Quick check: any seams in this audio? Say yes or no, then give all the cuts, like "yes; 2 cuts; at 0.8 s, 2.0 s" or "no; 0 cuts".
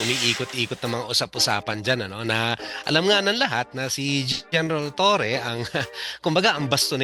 no; 0 cuts